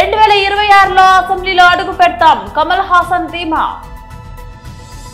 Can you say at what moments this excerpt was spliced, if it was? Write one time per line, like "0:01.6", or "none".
0:03.8